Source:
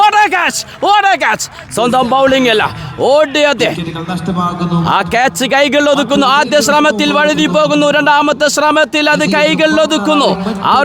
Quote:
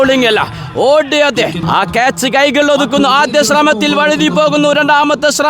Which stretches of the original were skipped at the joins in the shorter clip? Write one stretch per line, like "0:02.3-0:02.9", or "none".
0:03.9-0:04.8